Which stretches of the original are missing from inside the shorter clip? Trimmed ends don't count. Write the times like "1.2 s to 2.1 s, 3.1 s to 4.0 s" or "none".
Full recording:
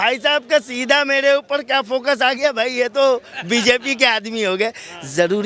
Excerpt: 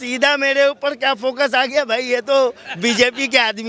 none